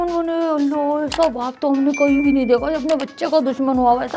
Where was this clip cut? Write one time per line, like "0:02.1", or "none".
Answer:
none